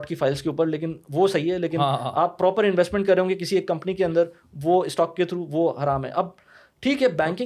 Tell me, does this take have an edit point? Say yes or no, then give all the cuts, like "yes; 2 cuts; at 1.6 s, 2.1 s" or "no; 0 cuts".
no; 0 cuts